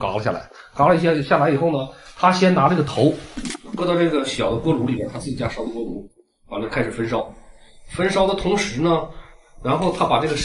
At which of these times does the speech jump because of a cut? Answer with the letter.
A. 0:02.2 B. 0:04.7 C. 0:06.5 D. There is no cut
D